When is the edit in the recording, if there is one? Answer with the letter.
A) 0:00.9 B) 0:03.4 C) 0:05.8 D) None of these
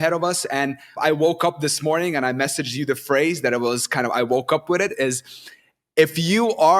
A